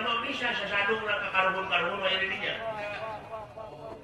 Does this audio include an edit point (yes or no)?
no